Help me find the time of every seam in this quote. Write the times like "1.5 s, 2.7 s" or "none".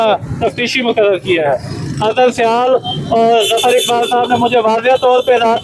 none